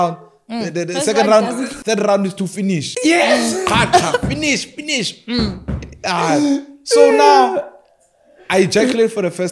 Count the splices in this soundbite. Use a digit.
2